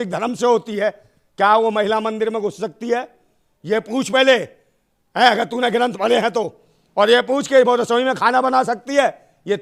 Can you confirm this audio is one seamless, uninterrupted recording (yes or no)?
yes